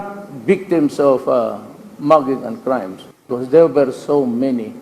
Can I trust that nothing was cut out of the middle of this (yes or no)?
no